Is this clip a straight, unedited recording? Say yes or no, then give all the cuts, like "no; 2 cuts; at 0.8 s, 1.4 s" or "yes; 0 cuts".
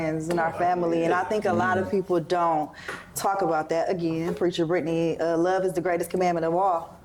yes; 0 cuts